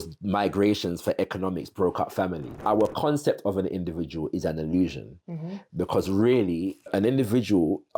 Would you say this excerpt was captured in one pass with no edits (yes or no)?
no